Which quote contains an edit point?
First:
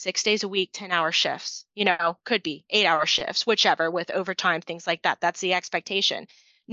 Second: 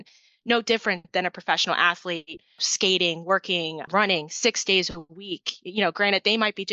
second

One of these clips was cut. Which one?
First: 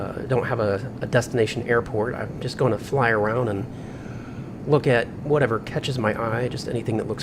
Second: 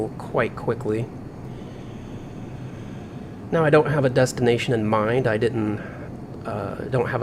first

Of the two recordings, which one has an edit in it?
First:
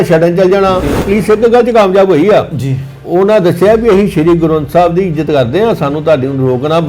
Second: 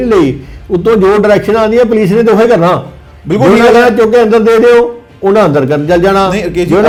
first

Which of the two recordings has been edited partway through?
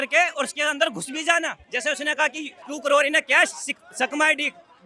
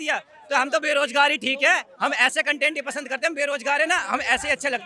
first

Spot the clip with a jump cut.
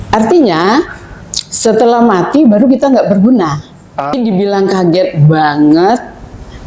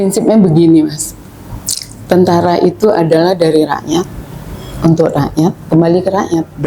first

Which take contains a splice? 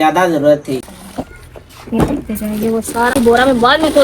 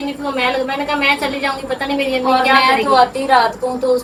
first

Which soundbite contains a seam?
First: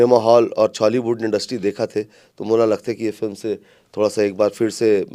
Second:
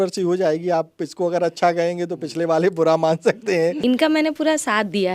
second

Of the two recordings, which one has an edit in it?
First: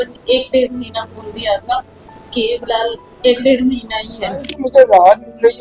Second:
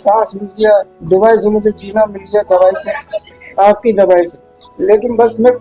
first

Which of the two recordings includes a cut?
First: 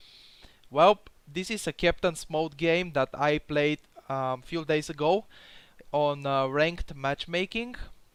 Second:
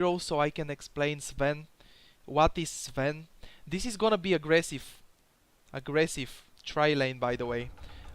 second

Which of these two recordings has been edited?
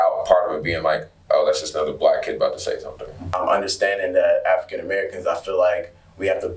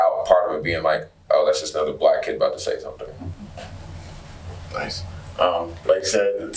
first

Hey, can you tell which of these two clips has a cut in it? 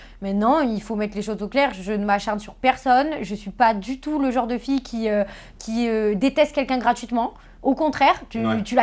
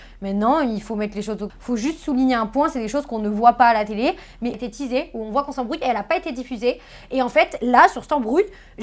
second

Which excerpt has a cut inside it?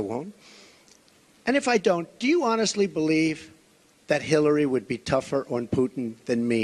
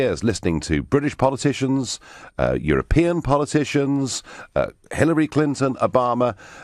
second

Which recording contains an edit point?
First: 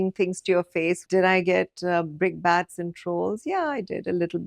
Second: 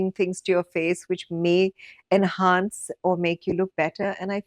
first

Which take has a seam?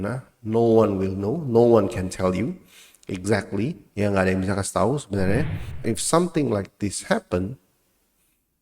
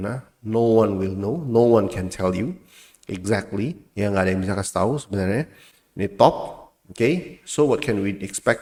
first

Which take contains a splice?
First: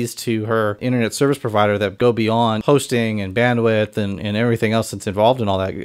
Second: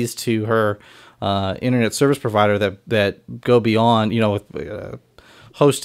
first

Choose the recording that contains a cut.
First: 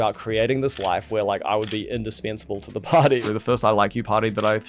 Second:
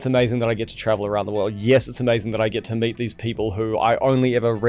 first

